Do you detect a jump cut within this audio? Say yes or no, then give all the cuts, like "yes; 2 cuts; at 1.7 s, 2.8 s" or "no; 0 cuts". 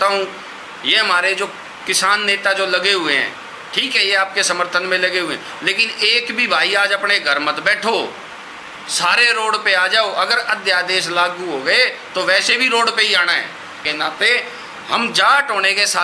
yes; 1 cut; at 13.8 s